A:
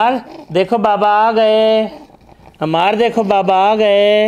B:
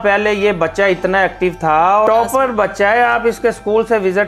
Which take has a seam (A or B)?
B